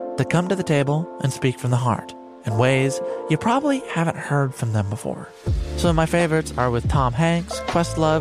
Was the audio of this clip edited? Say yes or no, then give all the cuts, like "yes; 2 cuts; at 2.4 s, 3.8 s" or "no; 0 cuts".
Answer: no; 0 cuts